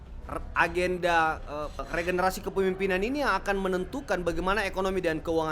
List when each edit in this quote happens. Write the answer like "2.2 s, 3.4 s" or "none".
1.8 s